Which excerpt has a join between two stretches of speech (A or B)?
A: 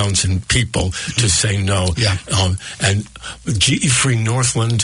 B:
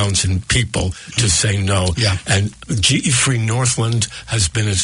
B